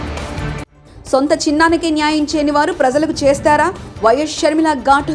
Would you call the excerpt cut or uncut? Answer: uncut